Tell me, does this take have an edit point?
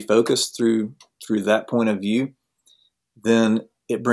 no; 0 cuts

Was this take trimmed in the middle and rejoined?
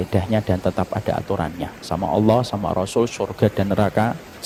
no; 0 cuts

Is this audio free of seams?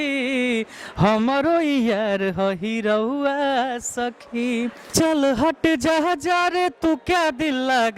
no; 1 cut; at 4.9 s

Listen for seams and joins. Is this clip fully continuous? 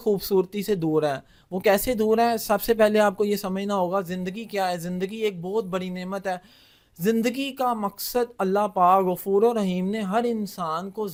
yes; 0 cuts

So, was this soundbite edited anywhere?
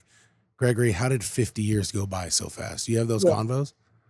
no; 0 cuts

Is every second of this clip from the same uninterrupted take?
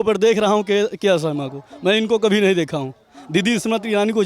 yes; 0 cuts

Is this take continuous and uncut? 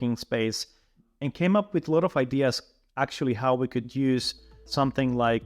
no; 2 cuts; at 1.0 s, 4.6 s

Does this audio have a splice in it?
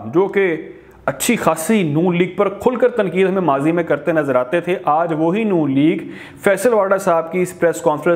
no; 0 cuts

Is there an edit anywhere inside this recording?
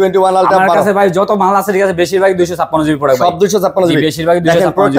no; 0 cuts

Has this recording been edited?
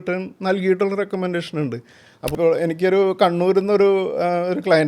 yes; 1 cut; at 2.3 s

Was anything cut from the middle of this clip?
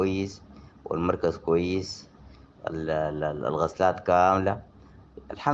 no; 0 cuts

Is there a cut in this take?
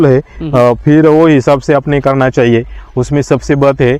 no; 0 cuts

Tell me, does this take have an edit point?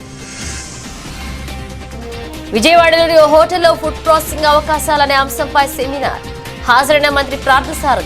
yes; 1 cut; at 2.0 s

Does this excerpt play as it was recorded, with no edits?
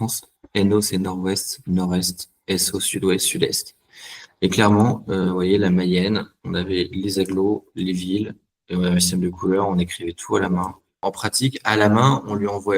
no; 1 cut; at 11.0 s

